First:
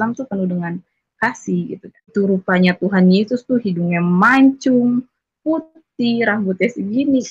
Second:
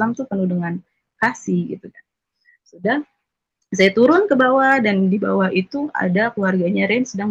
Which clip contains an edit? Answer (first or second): first